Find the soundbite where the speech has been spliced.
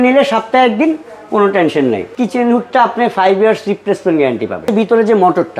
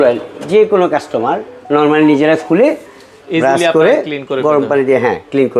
first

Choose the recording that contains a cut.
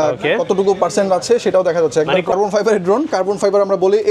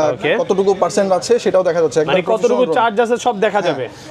first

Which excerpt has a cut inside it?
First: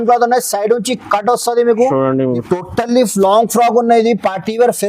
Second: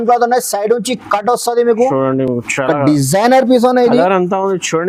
first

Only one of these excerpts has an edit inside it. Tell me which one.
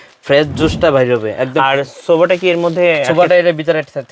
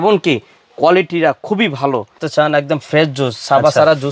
second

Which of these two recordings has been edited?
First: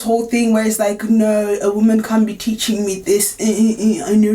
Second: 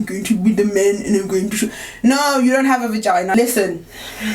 second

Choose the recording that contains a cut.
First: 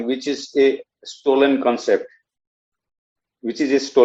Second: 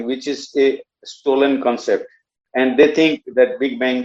second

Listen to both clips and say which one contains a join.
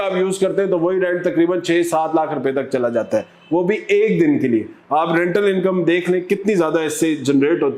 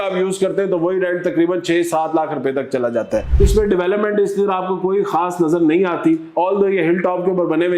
second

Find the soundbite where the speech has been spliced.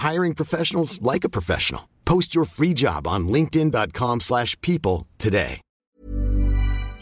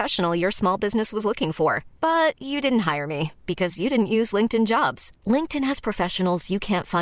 first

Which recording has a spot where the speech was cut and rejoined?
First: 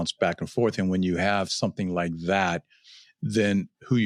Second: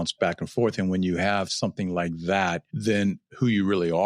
second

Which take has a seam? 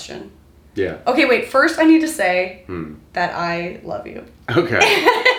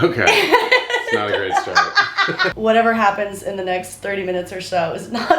second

